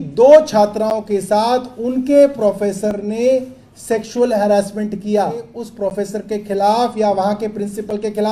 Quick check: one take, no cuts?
no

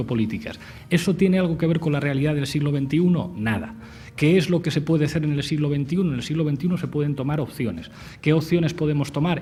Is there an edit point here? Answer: no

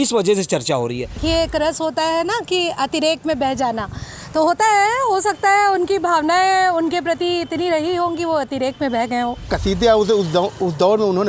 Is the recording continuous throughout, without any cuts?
no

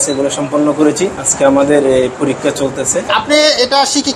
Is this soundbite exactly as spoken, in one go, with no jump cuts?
no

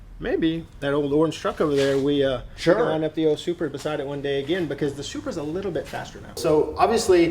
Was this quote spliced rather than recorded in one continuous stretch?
yes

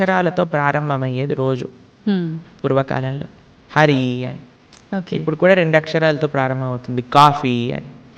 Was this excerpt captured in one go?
yes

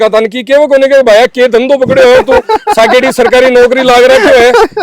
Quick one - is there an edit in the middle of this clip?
no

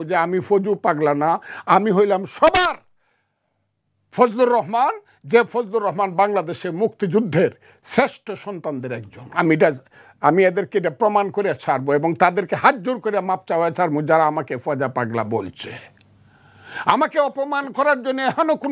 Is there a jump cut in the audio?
no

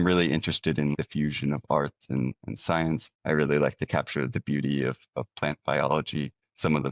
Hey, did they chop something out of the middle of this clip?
yes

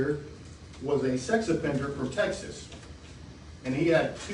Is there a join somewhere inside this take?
no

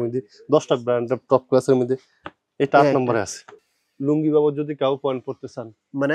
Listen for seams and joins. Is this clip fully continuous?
no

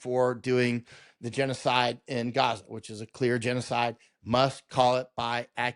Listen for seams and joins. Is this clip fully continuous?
yes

